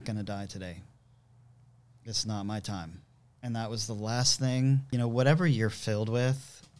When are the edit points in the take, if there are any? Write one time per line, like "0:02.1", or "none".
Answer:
0:04.9